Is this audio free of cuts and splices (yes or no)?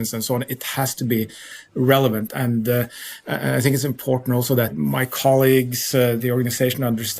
no